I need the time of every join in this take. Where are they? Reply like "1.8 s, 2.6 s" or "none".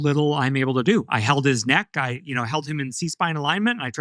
none